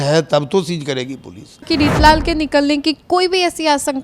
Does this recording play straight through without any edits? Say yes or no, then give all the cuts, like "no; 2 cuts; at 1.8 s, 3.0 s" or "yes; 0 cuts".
no; 1 cut; at 1.7 s